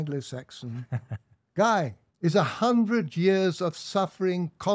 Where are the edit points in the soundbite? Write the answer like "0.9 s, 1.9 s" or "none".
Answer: 2.0 s